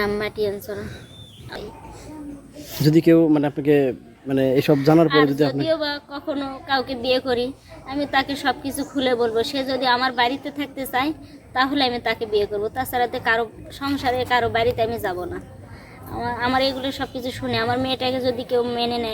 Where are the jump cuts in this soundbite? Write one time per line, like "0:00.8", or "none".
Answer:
0:01.5